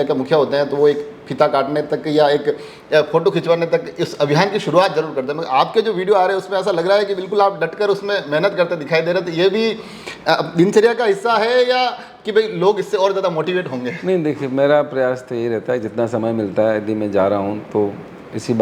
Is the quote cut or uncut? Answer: uncut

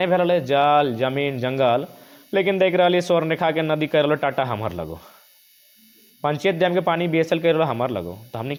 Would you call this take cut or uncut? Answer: uncut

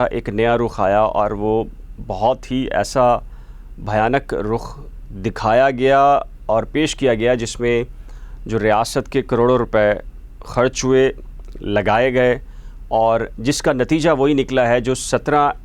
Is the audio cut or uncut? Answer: uncut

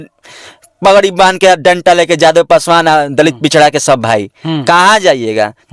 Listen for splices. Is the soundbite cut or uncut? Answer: uncut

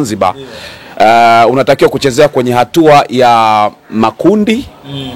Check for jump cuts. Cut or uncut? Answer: uncut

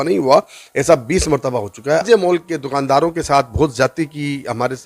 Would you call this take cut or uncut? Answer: cut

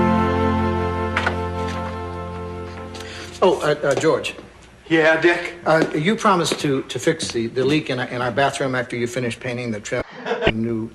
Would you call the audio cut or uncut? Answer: uncut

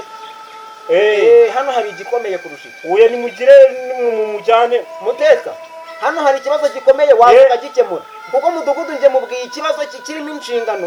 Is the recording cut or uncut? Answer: uncut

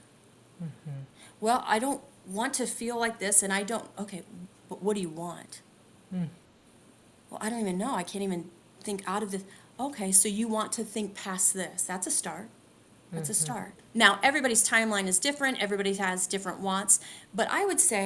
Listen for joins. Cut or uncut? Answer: cut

